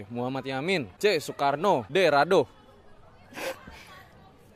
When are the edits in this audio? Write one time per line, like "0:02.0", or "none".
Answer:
0:00.9
0:01.9